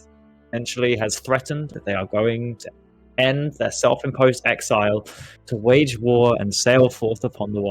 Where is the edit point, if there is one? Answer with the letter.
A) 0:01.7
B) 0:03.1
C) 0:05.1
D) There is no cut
A